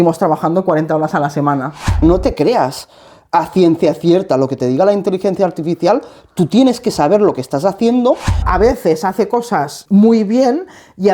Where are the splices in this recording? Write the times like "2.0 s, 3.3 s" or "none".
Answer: 2.0 s, 8.4 s, 9.8 s